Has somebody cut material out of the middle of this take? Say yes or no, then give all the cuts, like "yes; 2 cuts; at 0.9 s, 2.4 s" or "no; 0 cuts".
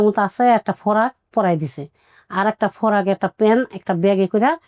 no; 0 cuts